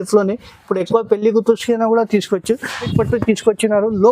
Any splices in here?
yes; 1 cut; at 2.8 s

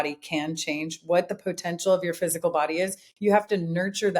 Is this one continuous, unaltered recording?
yes; 0 cuts

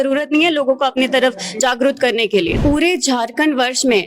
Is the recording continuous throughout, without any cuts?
no; 1 cut; at 2.6 s

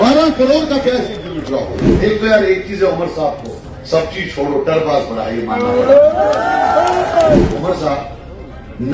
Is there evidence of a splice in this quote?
yes; 2 cuts; at 1.8 s, 7.5 s

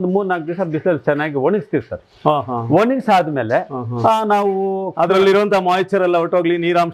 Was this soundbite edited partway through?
no; 0 cuts

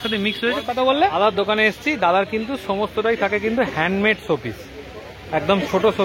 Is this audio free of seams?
no; 1 cut; at 1.1 s

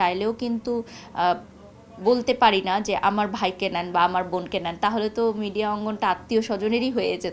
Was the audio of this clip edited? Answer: no; 0 cuts

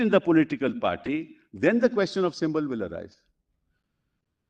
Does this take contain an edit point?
no; 0 cuts

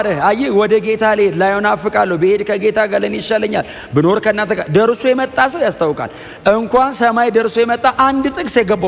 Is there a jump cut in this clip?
no; 0 cuts

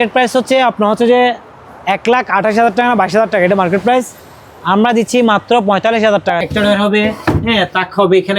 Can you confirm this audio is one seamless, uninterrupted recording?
no; 1 cut; at 6.4 s

